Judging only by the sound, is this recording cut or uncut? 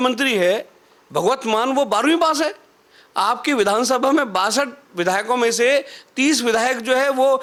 uncut